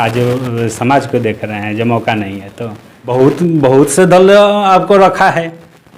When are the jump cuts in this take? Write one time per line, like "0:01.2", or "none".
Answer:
0:03.0